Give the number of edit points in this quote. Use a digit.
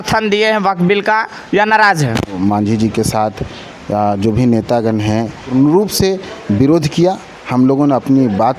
2